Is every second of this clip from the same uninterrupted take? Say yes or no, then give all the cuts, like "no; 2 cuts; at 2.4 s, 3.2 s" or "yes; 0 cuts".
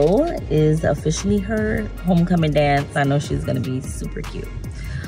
no; 1 cut; at 3.0 s